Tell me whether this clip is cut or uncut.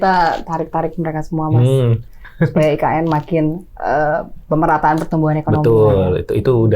uncut